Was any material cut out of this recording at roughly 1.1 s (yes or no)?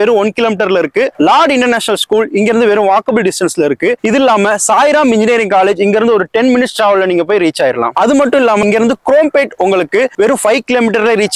no